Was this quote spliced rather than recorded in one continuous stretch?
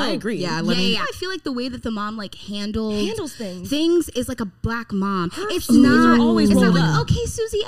yes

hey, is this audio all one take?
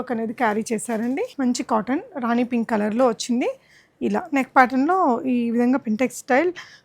no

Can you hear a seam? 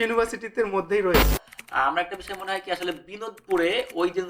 yes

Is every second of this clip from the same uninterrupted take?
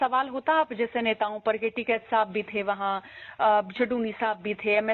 yes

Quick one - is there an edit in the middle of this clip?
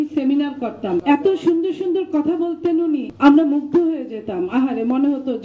yes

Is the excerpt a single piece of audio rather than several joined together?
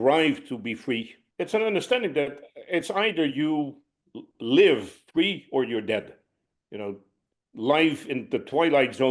no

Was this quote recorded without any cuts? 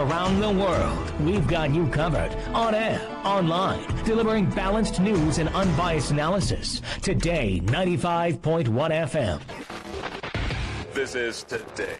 no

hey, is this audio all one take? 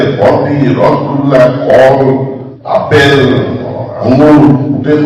yes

